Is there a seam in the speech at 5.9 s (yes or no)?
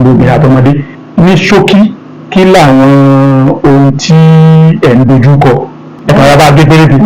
yes